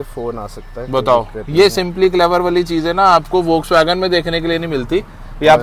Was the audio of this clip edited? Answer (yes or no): no